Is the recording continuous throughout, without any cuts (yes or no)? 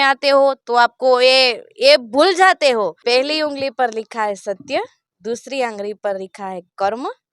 no